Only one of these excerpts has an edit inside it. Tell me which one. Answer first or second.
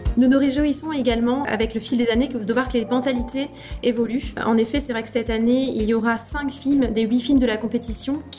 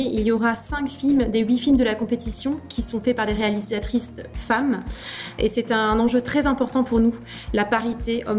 first